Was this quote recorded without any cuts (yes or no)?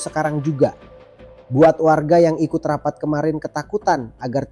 yes